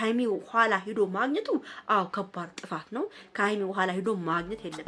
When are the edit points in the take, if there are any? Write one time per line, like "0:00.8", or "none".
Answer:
none